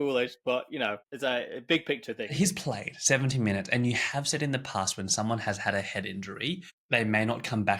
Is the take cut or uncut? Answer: cut